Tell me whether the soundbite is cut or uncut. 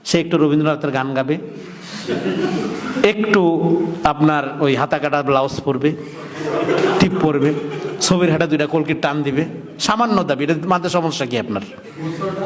uncut